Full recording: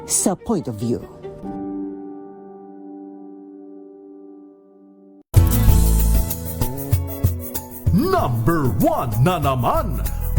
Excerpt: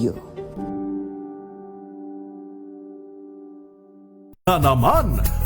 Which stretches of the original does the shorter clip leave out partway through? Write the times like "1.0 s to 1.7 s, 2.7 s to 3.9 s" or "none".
5.3 s to 9.3 s